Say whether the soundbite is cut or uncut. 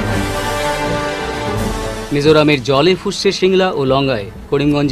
cut